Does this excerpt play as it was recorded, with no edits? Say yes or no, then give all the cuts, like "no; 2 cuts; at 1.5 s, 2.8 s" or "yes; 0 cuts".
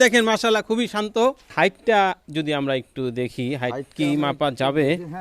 no; 1 cut; at 1.4 s